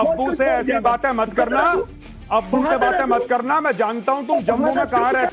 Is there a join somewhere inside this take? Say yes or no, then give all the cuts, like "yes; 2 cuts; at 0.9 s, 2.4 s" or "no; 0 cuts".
no; 0 cuts